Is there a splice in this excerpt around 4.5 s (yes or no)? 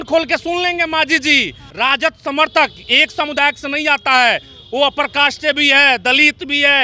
no